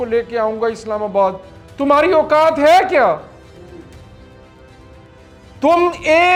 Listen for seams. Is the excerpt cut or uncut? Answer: uncut